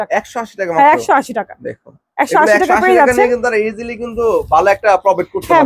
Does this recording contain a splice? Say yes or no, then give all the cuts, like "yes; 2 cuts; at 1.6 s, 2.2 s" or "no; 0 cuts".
no; 0 cuts